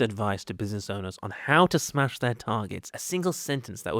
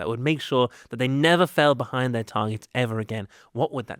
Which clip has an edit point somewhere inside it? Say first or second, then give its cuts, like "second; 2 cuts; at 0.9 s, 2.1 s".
first; 1 cut; at 2.8 s